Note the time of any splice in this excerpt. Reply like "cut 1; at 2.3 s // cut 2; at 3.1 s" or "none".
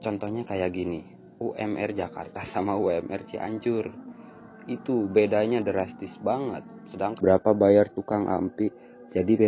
cut 1; at 7.1 s